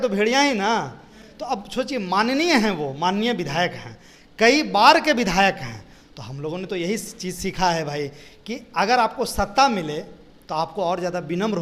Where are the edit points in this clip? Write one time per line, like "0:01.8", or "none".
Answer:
none

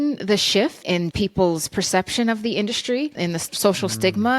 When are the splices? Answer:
0:01.0
0:03.1

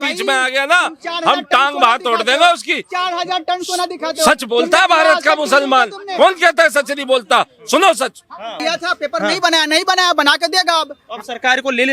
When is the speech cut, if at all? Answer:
0:08.6

